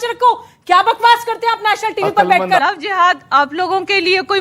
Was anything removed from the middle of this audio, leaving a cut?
yes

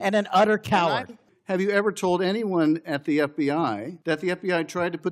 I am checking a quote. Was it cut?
yes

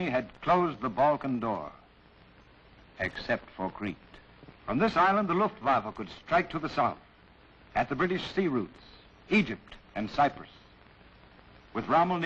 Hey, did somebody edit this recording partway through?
yes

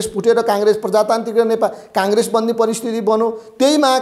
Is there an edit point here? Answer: no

